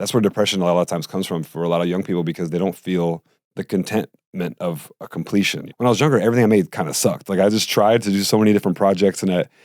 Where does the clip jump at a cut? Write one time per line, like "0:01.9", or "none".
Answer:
0:03.4
0:05.6